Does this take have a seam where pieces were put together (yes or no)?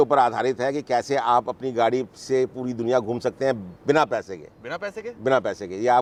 no